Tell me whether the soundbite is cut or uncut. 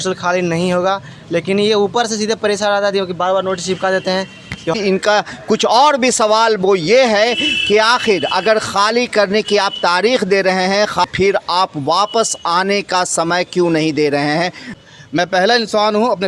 cut